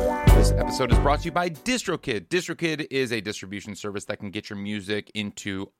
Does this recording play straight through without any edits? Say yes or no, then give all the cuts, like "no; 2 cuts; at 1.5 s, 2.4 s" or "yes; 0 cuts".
yes; 0 cuts